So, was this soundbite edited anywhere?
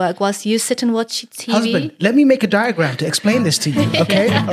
no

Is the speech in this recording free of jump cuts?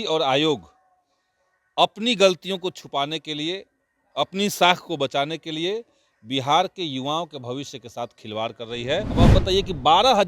no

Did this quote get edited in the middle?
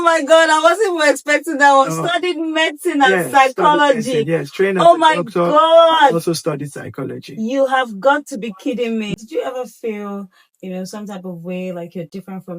yes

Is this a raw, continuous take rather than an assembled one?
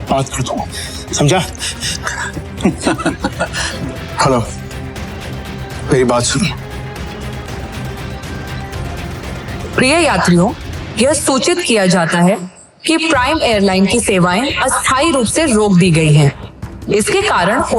no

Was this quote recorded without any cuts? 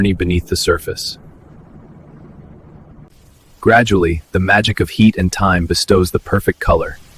yes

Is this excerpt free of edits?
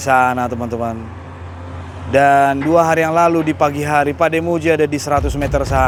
yes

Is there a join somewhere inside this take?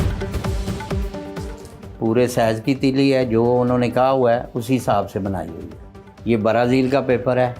yes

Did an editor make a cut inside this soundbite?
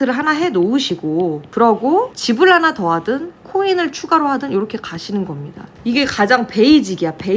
yes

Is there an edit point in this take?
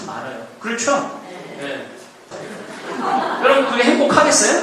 yes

